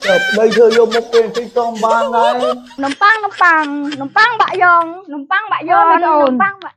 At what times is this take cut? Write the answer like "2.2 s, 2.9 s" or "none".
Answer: 2.8 s